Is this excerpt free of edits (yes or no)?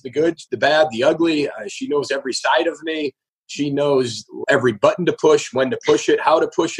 no